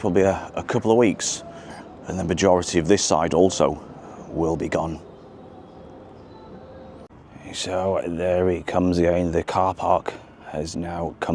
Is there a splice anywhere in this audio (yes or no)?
yes